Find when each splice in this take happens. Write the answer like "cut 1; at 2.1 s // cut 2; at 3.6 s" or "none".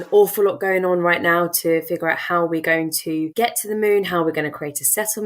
cut 1; at 3.3 s